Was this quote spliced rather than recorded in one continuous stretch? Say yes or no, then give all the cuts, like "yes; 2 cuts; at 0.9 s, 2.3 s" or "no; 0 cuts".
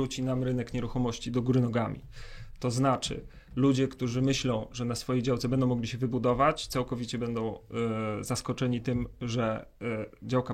no; 0 cuts